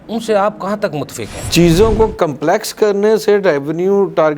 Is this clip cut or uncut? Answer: cut